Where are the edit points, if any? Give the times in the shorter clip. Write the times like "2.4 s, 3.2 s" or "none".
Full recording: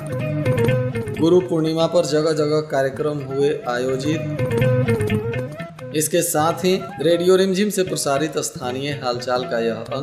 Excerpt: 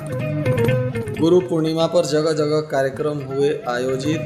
none